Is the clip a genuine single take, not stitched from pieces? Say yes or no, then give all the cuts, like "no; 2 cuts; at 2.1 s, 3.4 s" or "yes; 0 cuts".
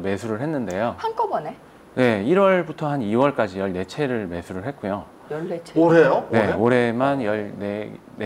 yes; 0 cuts